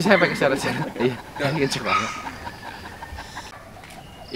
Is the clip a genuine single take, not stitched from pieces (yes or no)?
yes